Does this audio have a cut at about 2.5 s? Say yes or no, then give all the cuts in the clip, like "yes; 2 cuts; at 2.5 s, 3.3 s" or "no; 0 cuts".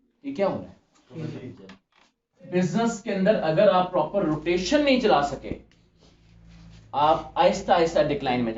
yes; 1 cut; at 2.5 s